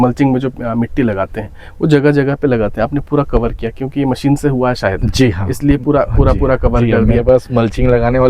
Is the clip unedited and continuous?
yes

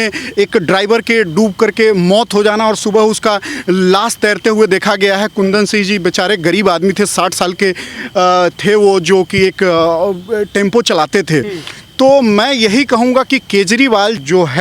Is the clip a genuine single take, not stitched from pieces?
yes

